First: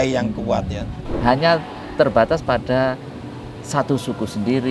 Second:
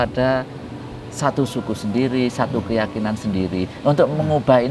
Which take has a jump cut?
first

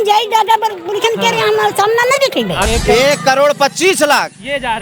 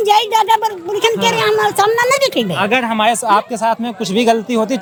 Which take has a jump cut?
first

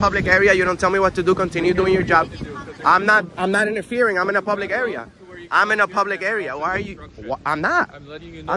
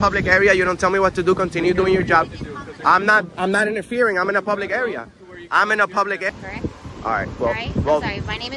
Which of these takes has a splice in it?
second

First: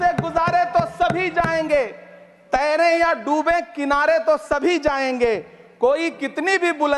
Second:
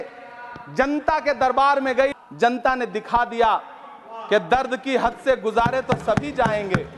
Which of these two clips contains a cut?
second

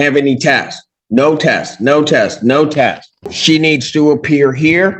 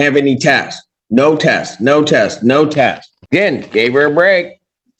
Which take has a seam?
first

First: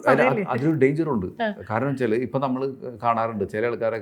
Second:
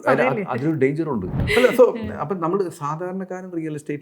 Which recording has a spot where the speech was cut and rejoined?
second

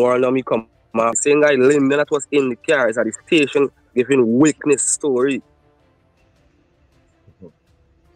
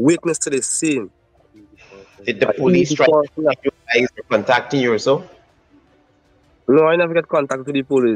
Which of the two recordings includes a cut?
first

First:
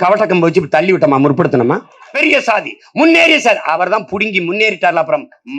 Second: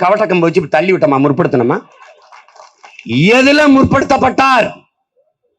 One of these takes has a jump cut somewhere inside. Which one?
first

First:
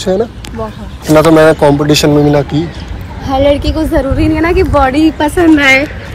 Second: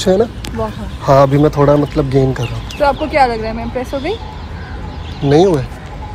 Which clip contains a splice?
first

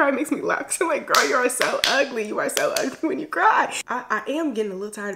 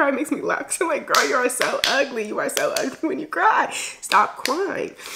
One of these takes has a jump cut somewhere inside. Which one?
first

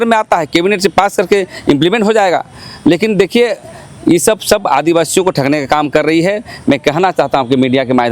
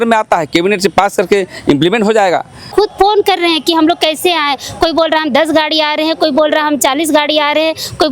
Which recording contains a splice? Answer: second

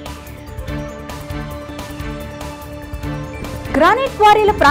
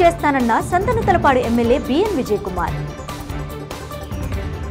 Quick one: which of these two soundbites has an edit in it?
first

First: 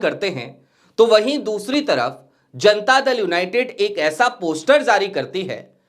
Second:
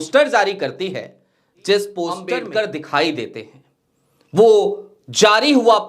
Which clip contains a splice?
second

